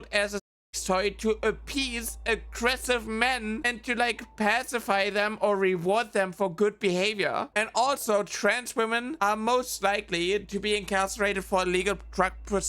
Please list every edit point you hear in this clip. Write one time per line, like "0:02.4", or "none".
0:07.5